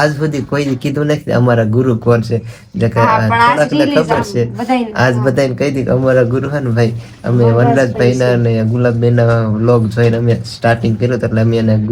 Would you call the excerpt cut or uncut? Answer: uncut